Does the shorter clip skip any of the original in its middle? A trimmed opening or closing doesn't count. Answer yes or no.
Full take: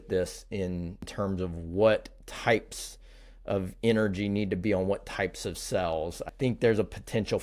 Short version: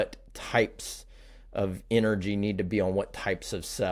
no